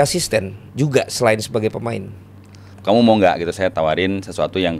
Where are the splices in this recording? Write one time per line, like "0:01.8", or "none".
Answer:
0:02.8
0:03.7